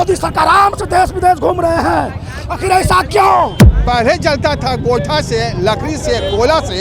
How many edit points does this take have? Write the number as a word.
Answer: one